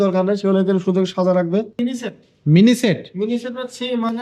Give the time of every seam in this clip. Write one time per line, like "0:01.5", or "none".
0:01.7